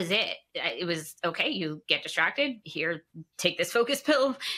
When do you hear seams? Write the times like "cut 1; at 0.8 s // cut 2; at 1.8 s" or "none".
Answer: none